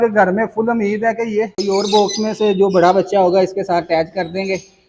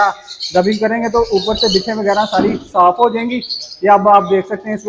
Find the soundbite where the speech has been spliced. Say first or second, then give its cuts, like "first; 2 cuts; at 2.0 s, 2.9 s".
first; 1 cut; at 1.5 s